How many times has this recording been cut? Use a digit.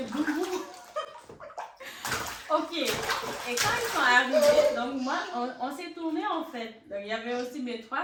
0